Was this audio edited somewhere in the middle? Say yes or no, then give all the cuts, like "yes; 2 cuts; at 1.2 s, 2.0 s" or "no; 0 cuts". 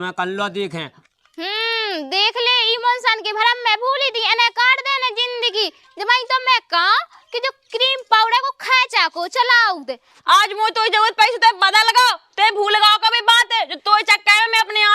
yes; 2 cuts; at 0.9 s, 10.2 s